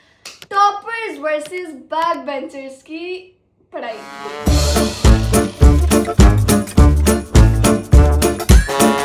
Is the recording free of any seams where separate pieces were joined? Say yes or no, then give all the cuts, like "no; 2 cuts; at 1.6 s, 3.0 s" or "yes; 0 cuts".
yes; 0 cuts